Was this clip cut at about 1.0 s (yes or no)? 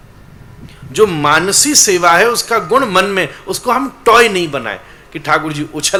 no